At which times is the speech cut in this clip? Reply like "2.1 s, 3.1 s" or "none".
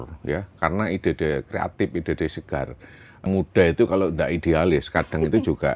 3.3 s